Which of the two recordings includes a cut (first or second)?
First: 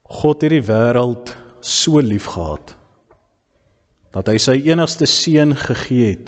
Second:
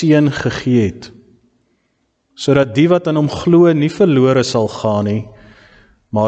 first